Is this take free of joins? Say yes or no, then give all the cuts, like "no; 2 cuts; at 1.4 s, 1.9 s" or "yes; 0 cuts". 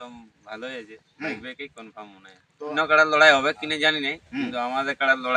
no; 1 cut; at 2.7 s